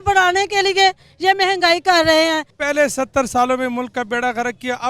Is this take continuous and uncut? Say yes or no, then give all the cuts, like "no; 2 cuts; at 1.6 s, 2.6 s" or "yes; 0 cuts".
no; 1 cut; at 2.5 s